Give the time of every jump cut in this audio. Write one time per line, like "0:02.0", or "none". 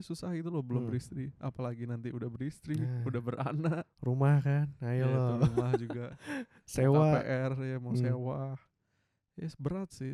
none